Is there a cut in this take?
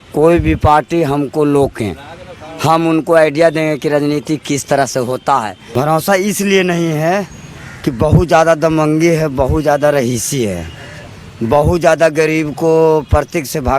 yes; 1 cut; at 5.6 s

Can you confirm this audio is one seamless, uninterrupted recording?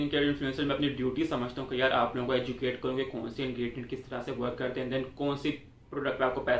yes; 0 cuts

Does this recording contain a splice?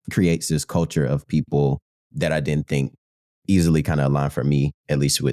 yes; 1 cut; at 2.0 s

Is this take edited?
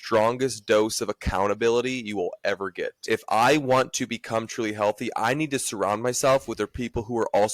yes; 1 cut; at 3.0 s

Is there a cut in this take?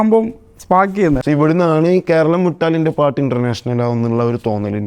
yes; 1 cut; at 1.2 s

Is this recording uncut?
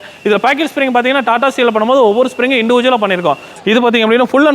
no; 1 cut; at 3.5 s

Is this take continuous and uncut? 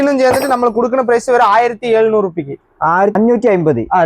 no; 1 cut; at 3.1 s

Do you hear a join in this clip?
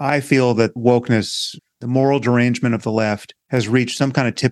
yes; 1 cut; at 3.3 s

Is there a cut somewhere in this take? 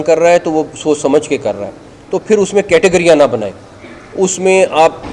no; 0 cuts

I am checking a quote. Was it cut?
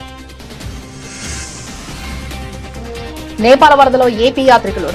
yes; 1 cut; at 2.2 s

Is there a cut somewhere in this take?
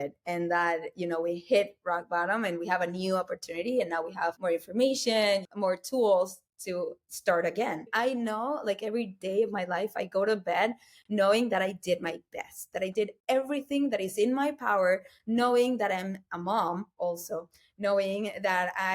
yes; 4 cuts; at 4.4 s, 5.5 s, 7.1 s, 7.9 s

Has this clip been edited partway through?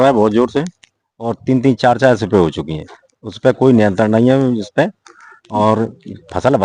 no; 0 cuts

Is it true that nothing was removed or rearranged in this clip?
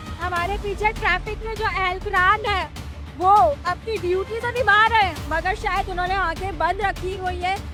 yes; 0 cuts

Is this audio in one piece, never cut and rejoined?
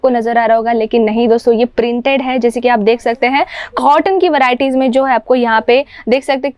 yes; 0 cuts

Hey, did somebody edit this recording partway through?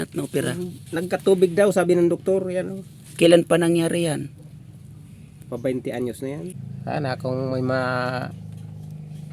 yes; 1 cut; at 6.6 s

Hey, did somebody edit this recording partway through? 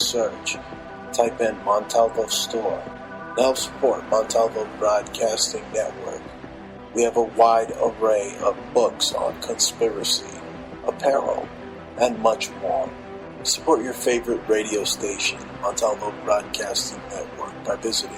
no; 0 cuts

